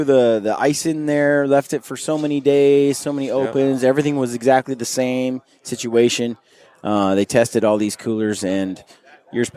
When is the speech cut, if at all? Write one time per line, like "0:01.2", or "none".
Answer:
none

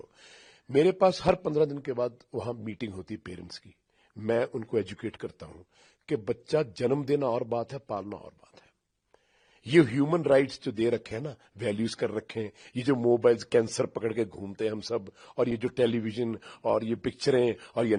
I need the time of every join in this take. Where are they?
none

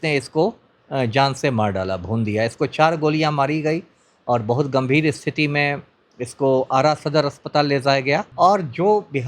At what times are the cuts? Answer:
0:08.3

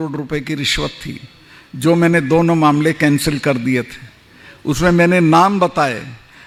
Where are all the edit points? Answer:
none

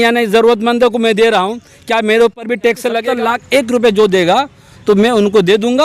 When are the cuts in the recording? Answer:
0:03.1

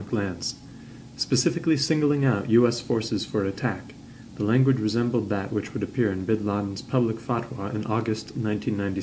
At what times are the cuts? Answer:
0:06.7

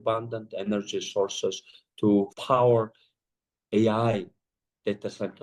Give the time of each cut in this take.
none

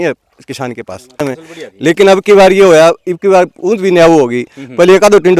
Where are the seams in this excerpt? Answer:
0:01.2

